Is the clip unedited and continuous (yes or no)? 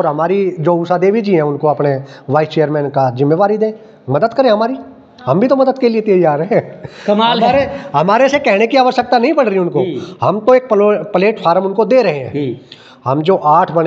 yes